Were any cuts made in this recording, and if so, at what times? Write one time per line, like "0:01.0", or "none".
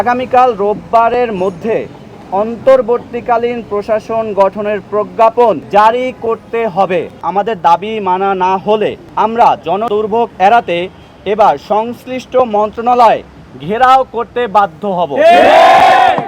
0:05.6
0:07.2
0:09.0
0:09.9